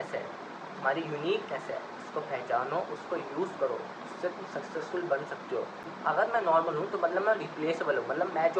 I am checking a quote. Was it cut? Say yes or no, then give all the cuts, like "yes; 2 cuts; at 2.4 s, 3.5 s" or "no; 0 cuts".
yes; 1 cut; at 5.8 s